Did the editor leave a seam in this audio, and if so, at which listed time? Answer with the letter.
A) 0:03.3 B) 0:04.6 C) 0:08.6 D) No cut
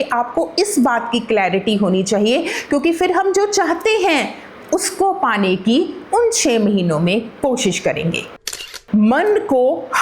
C